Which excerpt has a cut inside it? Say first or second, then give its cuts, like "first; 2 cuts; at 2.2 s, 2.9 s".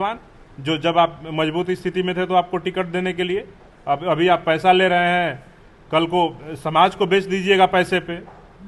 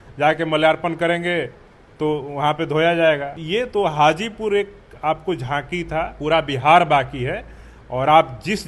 second; 2 cuts; at 3.4 s, 6.2 s